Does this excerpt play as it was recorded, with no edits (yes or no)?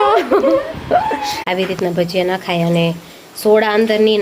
no